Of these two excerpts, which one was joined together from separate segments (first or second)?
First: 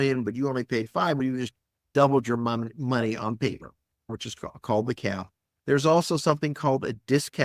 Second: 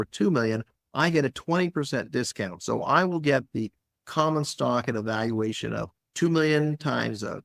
first